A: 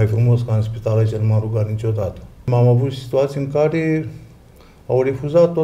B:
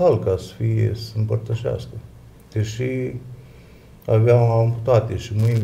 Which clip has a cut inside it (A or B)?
A